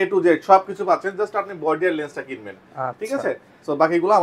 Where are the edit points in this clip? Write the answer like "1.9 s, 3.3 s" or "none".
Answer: none